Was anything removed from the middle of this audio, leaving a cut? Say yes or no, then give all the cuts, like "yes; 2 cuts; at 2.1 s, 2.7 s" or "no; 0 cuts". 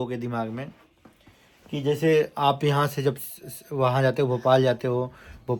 no; 0 cuts